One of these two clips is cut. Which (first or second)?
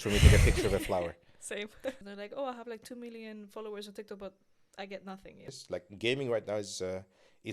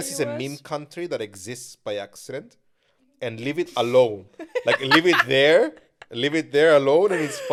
first